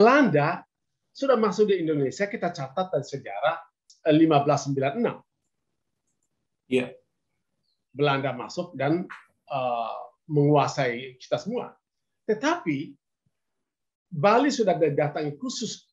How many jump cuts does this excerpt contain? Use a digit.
1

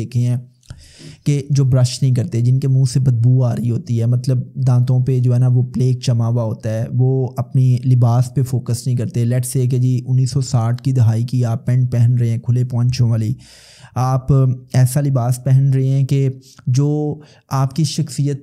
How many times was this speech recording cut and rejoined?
0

